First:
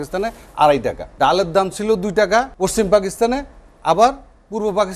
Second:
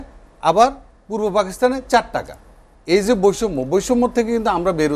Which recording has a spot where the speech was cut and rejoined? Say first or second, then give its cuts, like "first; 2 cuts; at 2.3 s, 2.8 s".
first; 2 cuts; at 1.0 s, 2.5 s